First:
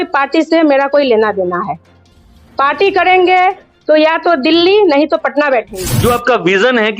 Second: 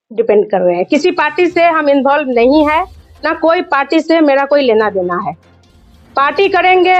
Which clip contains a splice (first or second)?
first